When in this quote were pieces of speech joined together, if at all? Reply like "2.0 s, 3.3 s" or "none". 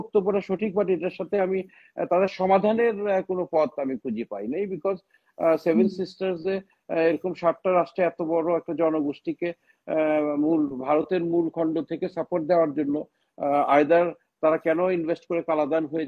none